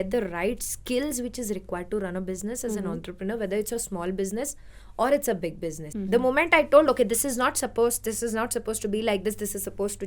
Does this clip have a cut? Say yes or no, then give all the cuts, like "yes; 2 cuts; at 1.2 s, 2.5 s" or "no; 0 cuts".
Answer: yes; 1 cut; at 5.8 s